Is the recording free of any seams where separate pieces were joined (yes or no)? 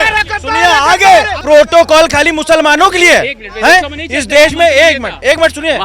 no